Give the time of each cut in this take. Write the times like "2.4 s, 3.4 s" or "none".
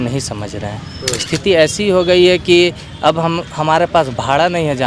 1.3 s